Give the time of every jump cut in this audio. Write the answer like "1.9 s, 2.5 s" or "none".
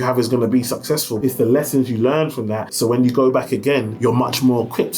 1.1 s, 2.6 s, 3.9 s